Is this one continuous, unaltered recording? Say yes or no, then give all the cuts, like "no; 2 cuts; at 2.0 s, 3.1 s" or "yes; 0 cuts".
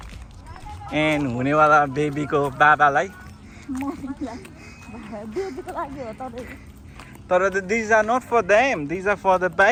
yes; 0 cuts